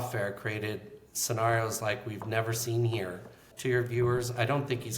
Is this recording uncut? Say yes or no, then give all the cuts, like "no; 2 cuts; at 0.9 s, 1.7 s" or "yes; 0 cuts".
no; 1 cut; at 3.4 s